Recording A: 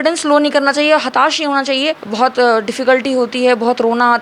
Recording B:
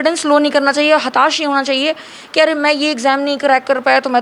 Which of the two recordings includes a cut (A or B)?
A